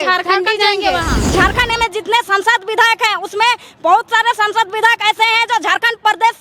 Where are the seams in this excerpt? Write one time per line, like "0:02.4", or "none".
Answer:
0:01.2